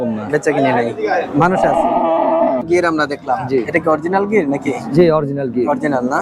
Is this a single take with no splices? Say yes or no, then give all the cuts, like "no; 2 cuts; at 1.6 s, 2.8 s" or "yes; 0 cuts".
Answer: no; 1 cut; at 2.6 s